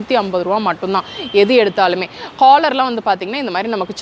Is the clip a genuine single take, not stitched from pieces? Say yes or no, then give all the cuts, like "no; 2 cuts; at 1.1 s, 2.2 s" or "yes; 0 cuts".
yes; 0 cuts